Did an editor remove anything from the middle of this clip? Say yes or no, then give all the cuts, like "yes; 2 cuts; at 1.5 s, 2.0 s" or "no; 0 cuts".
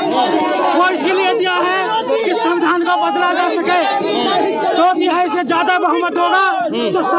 no; 0 cuts